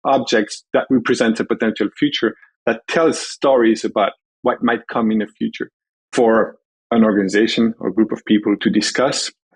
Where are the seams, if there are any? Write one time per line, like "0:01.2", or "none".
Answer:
0:08.6